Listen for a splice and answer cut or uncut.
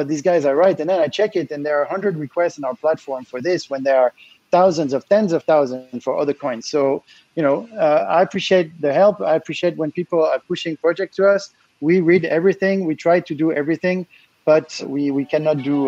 cut